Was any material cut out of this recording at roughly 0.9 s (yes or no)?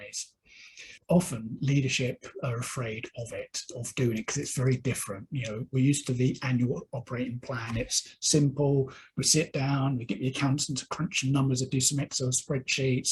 yes